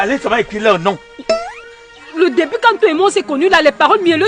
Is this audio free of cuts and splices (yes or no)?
yes